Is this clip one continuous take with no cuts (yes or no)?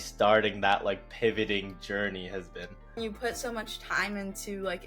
no